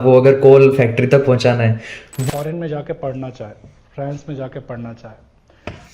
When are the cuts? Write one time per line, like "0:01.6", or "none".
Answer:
0:02.1